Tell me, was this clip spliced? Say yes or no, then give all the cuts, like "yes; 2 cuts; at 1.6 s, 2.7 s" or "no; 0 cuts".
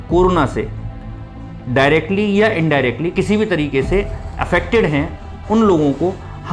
no; 0 cuts